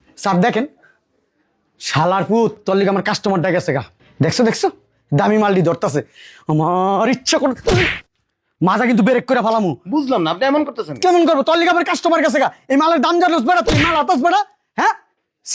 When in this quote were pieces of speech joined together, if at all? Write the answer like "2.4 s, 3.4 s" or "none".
none